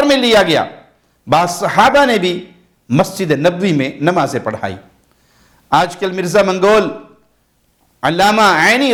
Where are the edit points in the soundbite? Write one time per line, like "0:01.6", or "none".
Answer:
none